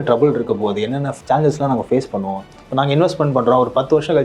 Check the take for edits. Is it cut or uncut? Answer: cut